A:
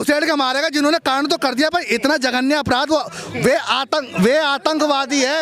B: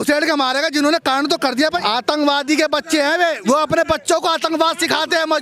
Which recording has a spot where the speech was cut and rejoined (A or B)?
B